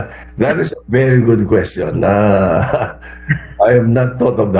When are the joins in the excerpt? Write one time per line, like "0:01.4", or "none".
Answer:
none